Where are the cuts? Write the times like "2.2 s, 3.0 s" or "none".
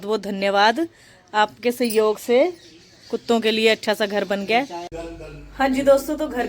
5.0 s